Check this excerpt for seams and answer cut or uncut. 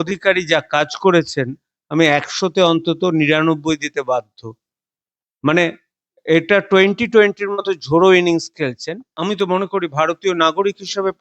cut